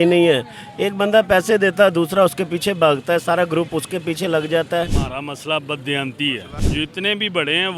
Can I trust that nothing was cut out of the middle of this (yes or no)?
no